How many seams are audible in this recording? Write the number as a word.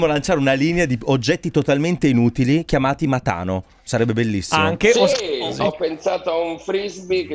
one